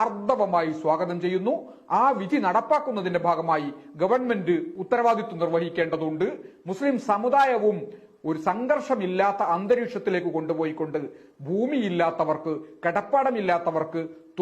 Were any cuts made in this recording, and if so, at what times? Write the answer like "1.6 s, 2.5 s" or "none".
4.7 s